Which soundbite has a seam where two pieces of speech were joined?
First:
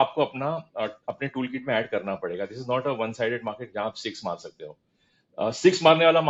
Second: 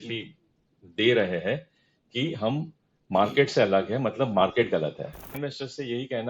second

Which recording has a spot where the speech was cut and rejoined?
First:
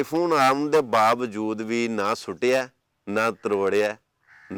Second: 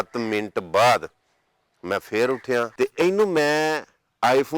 second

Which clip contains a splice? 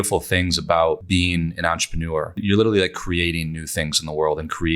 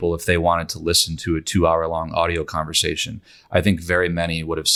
first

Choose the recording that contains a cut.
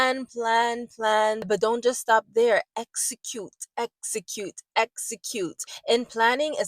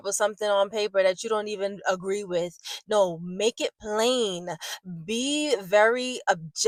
first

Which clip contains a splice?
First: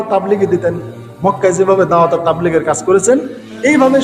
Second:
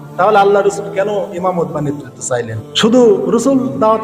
second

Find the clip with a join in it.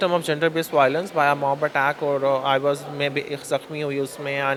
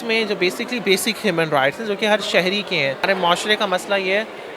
second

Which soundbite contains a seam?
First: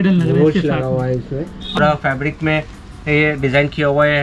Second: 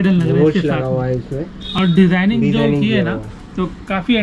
first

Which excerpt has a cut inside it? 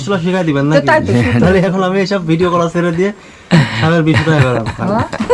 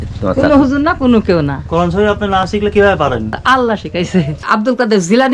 second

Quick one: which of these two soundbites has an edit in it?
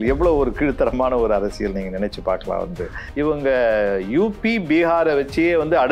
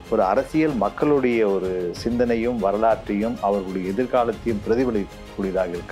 first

